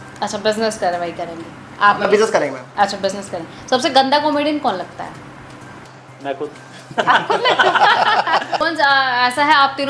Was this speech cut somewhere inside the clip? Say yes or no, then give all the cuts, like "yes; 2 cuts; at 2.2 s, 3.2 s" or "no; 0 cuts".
yes; 1 cut; at 8.7 s